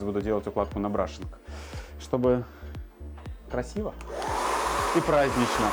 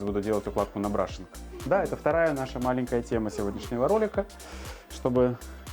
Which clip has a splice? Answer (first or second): first